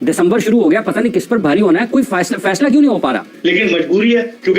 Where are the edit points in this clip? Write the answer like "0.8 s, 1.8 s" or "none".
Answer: 3.3 s